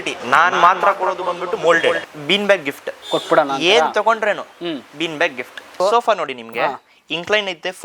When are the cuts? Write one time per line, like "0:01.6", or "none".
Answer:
0:02.0
0:05.8